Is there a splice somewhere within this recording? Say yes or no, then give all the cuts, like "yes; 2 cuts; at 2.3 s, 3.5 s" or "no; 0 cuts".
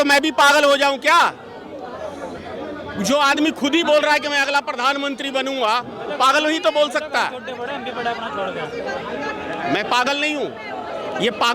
no; 0 cuts